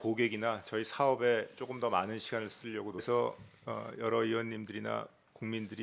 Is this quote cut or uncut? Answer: uncut